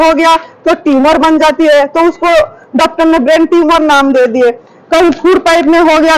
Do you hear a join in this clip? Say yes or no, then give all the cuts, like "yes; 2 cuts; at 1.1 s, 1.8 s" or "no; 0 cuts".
no; 0 cuts